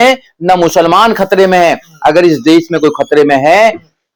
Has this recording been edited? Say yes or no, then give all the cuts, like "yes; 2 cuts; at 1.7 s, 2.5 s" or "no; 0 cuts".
no; 0 cuts